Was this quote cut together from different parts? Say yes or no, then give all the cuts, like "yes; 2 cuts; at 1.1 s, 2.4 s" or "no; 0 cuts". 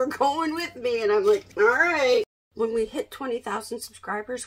yes; 2 cuts; at 1.5 s, 2.3 s